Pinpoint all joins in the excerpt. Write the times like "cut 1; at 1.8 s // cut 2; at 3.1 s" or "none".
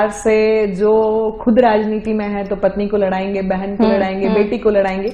none